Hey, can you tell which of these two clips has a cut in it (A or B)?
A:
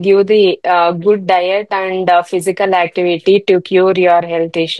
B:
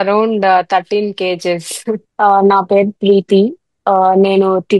B